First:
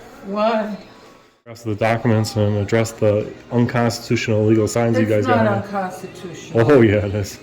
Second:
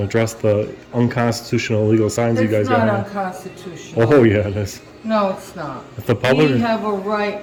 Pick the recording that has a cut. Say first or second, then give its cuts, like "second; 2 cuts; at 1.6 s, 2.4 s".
first; 1 cut; at 1.7 s